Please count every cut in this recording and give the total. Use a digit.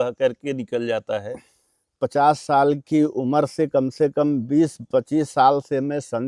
1